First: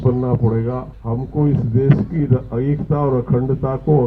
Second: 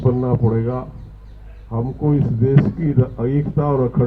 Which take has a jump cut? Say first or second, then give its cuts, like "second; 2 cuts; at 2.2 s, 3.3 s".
first; 1 cut; at 0.9 s